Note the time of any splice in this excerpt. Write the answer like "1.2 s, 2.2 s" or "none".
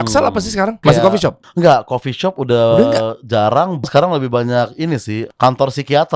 1.1 s, 3.8 s, 5.2 s

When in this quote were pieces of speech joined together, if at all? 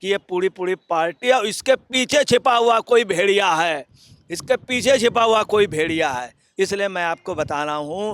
6.4 s

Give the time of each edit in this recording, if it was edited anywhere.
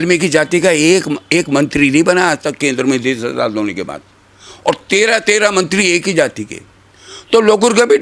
none

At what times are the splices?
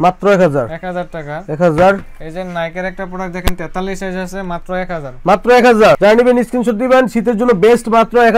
none

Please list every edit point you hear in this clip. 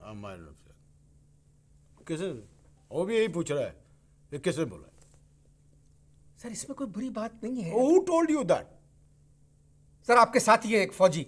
none

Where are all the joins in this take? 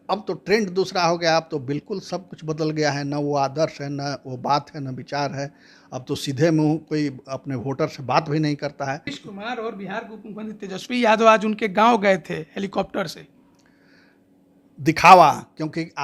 9.2 s

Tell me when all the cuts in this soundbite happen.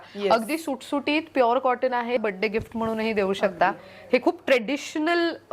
2.2 s

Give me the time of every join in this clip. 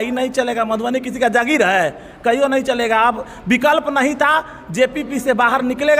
none

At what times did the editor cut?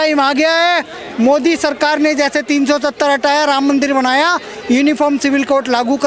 none

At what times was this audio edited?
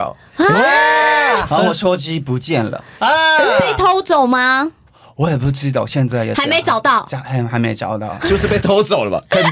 none

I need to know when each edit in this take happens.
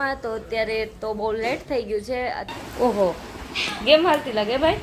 2.5 s

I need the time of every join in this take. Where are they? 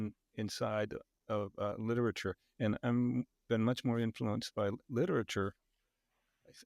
none

